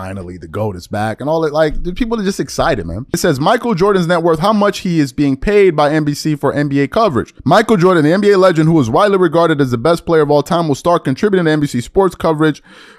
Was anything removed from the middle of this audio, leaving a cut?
yes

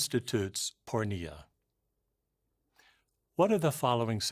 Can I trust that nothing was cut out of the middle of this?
no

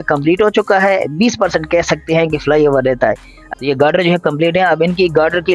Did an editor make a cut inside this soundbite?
yes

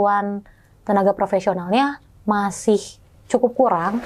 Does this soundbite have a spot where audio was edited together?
no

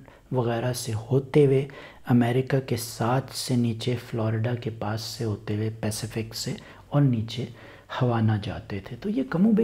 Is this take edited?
no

